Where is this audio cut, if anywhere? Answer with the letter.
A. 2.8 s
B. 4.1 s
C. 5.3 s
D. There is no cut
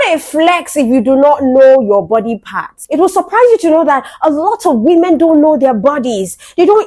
A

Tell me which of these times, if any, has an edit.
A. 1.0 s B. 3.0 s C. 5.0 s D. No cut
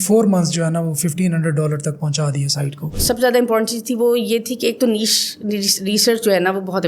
B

